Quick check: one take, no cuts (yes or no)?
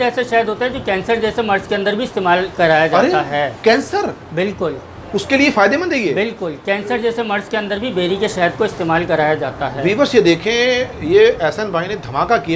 yes